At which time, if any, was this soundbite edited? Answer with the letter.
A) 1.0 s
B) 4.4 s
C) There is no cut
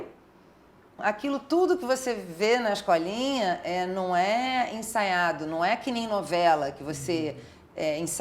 A